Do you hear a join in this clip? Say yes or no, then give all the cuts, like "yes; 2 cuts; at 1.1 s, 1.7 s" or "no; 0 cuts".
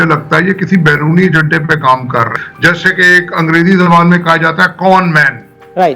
yes; 1 cut; at 2.4 s